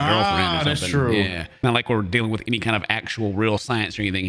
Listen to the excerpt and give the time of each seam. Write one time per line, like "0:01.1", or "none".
0:01.4